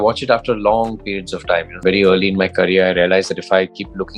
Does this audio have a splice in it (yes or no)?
yes